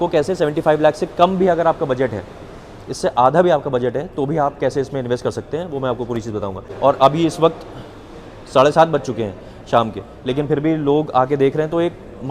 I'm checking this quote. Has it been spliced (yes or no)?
yes